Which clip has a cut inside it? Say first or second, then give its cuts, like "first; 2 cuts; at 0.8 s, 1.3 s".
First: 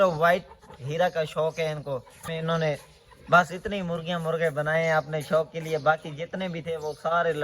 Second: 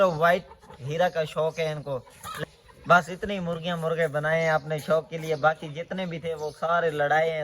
second; 1 cut; at 2.4 s